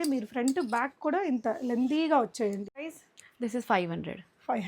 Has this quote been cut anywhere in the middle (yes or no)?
yes